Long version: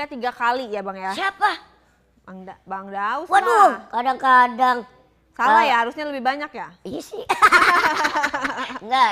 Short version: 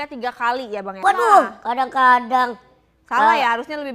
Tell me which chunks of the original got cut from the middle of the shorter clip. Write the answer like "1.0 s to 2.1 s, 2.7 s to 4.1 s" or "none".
1.0 s to 3.3 s